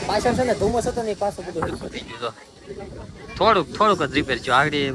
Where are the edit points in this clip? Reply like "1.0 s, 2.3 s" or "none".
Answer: none

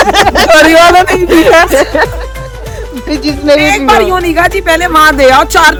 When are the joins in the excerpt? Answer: none

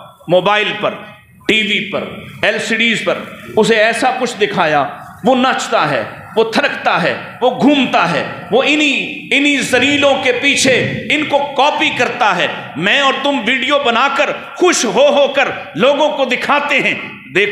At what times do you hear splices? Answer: none

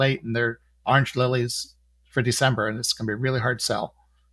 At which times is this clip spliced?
none

